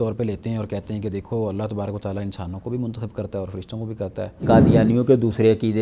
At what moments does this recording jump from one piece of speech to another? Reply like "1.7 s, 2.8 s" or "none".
4.4 s